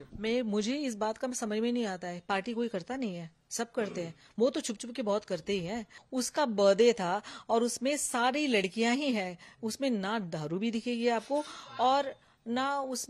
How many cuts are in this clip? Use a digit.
1